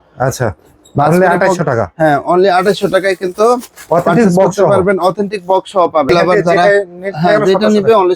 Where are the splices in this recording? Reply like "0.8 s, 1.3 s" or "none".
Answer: 6.1 s